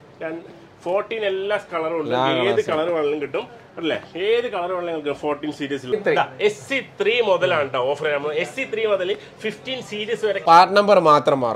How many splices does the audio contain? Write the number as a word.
two